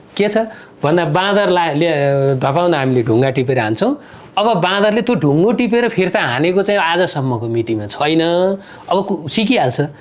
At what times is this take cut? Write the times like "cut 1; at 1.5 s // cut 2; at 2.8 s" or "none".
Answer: none